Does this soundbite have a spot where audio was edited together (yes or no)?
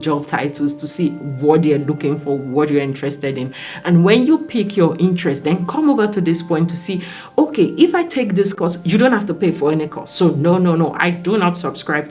no